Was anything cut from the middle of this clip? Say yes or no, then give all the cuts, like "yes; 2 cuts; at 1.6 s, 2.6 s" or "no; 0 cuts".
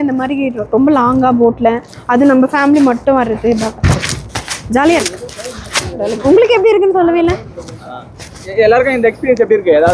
no; 0 cuts